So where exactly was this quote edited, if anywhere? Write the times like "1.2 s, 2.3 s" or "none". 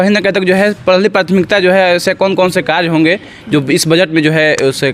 none